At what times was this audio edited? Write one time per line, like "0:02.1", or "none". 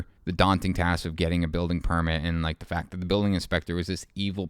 none